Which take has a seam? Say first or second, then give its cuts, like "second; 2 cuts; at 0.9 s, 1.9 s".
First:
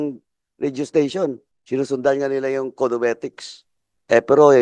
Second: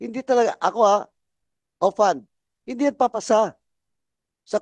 first; 1 cut; at 1.5 s